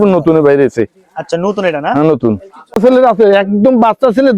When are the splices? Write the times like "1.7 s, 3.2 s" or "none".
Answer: 2.8 s